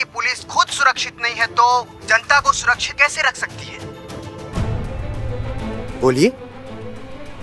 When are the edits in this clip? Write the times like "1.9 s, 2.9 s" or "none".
5.9 s